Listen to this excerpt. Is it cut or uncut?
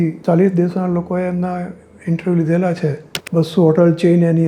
cut